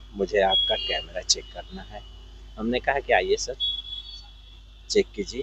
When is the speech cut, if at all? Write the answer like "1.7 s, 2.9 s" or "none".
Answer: none

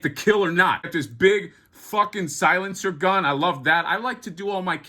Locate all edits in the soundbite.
0.9 s

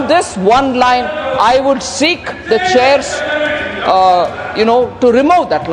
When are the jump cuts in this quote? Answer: none

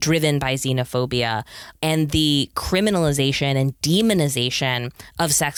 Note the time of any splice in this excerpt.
none

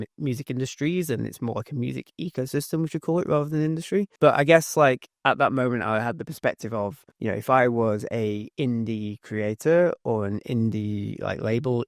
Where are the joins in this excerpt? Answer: 4.1 s, 7.1 s

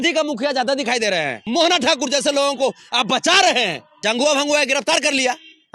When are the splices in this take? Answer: 1.4 s, 3.9 s

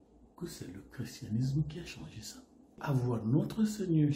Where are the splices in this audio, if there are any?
2.8 s

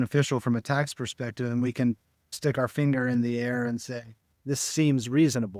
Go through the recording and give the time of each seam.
none

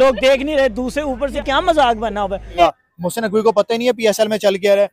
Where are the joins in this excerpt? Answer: 1.3 s, 2.6 s

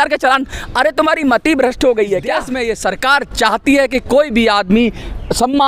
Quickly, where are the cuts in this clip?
2.5 s

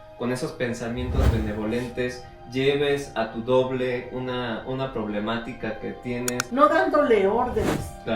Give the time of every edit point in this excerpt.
6.4 s

